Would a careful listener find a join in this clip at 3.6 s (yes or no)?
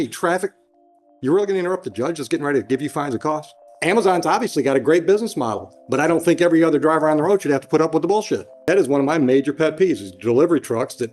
yes